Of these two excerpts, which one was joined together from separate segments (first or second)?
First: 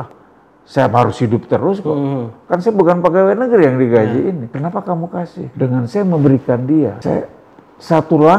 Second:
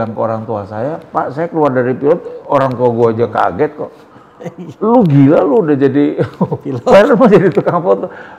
first